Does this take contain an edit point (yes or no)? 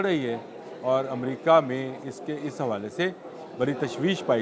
no